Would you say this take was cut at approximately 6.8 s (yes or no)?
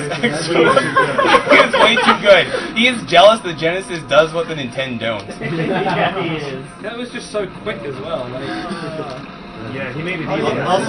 no